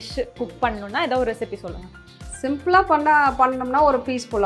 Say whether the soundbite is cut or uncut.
uncut